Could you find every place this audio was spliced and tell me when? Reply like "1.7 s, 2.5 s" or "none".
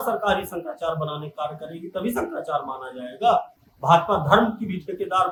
none